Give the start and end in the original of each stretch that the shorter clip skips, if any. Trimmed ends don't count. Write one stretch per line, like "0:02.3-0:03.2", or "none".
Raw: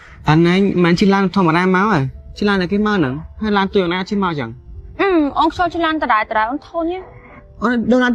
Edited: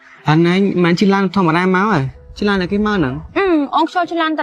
0:03.2-0:04.8